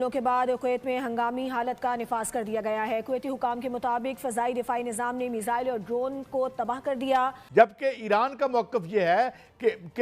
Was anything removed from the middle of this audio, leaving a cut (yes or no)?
yes